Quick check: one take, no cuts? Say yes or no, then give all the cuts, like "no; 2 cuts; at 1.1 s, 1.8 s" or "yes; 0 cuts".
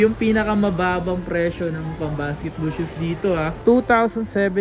yes; 0 cuts